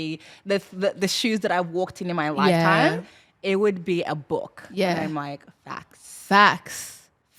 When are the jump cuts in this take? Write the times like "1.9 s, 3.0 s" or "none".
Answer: none